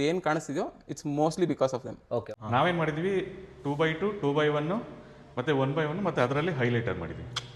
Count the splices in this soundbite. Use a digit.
1